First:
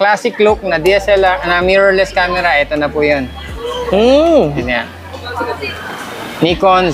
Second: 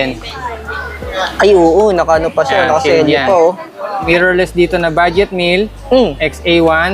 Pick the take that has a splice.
second; 1 cut; at 4.0 s

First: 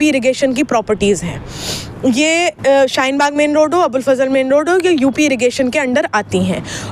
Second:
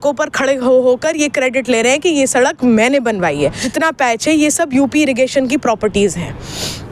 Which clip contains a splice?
second; 1 cut; at 3.7 s

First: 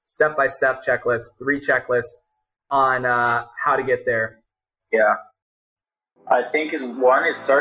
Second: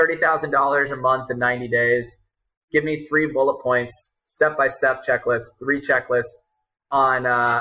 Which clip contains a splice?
first; 1 cut; at 4.4 s

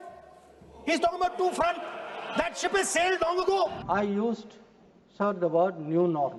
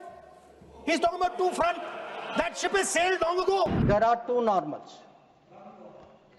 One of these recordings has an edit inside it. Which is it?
second; 1 cut; at 3.8 s

